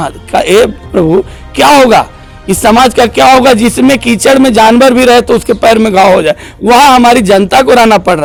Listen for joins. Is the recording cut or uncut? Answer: uncut